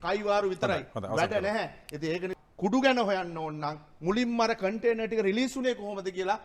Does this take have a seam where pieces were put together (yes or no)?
yes